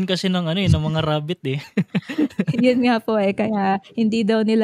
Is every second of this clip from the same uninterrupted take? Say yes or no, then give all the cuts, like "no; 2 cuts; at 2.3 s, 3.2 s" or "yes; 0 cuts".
yes; 0 cuts